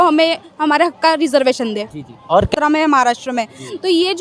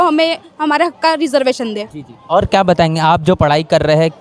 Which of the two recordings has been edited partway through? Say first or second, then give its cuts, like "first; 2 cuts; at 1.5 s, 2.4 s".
first; 1 cut; at 2.5 s